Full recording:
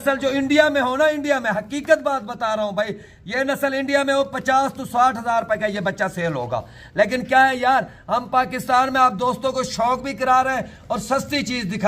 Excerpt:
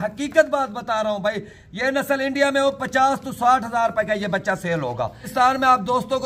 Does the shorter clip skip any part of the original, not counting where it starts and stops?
yes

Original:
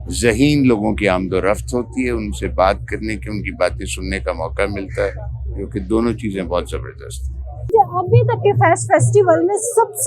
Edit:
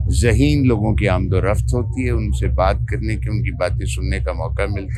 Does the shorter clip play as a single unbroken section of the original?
yes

